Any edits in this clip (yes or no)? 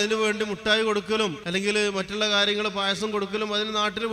yes